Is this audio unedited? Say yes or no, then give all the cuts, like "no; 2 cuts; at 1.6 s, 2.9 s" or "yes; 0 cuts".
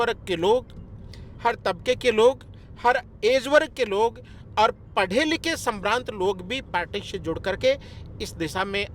yes; 0 cuts